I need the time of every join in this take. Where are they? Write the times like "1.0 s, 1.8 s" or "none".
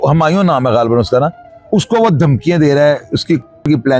none